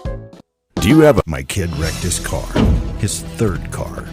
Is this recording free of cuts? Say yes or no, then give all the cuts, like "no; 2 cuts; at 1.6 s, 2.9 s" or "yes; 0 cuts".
no; 1 cut; at 1.2 s